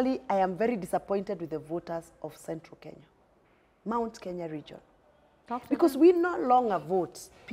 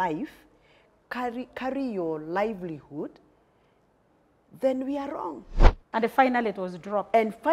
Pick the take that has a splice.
second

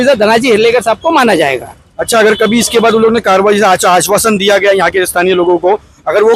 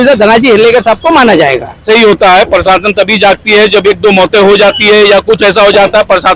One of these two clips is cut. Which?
second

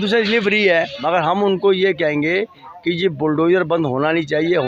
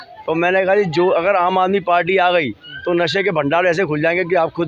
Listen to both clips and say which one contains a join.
first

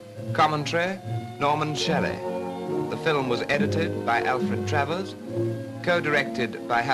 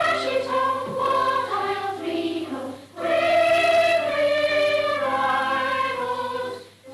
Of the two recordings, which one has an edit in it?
second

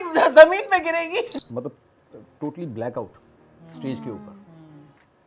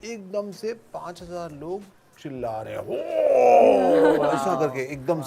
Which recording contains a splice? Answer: first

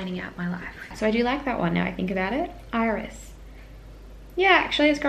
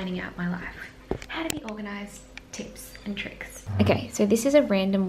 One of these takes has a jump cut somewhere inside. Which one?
first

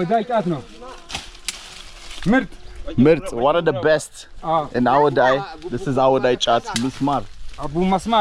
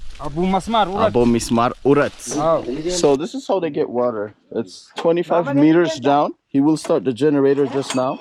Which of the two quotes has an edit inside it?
second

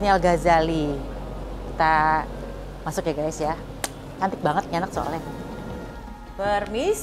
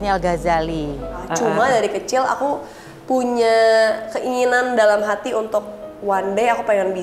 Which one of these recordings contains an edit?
second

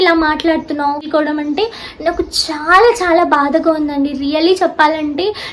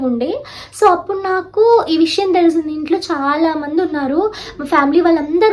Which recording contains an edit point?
first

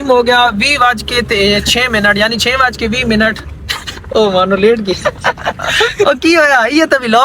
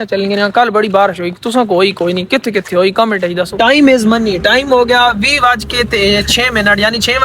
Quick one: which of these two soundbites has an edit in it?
second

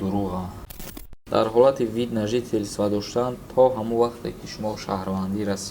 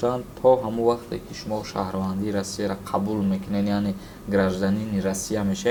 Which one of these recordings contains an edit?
first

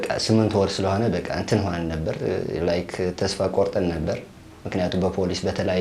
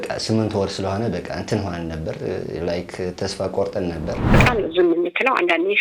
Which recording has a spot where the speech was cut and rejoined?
second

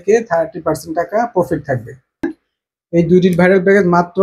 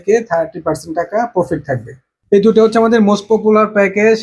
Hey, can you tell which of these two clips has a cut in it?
first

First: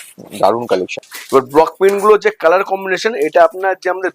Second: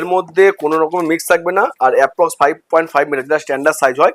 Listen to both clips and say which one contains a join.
first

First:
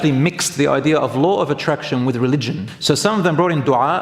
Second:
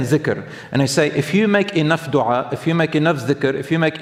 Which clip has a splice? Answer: first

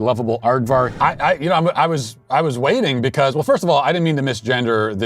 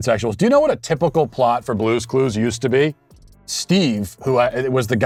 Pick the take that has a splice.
first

